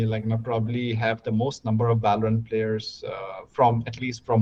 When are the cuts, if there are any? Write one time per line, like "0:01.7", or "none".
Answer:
none